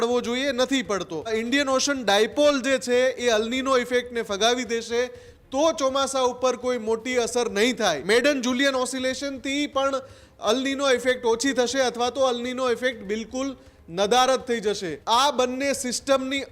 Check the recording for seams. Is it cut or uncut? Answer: cut